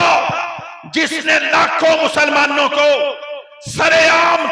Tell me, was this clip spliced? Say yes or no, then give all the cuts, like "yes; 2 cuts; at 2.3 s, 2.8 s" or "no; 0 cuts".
no; 0 cuts